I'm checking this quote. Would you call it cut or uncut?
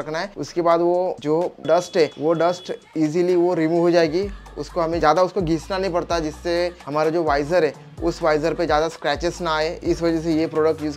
uncut